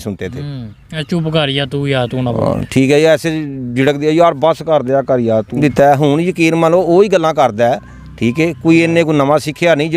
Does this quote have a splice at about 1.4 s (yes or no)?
no